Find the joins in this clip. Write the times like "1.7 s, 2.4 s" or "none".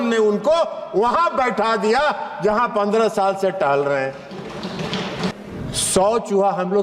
5.3 s